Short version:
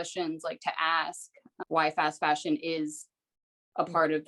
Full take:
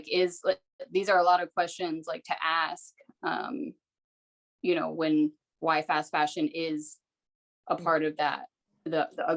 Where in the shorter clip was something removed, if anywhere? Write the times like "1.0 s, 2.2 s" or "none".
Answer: 1.5 s